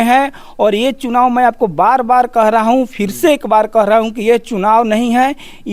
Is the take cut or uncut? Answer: uncut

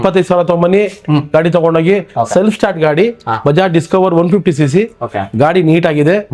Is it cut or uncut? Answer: uncut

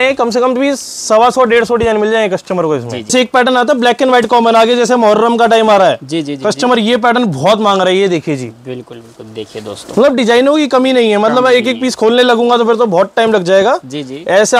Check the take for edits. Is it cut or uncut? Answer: cut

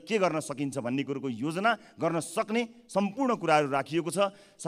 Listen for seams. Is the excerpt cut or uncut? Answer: uncut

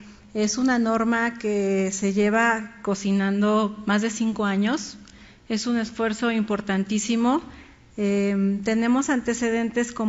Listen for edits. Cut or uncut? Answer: cut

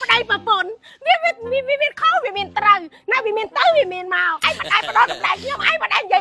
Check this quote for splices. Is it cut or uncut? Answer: cut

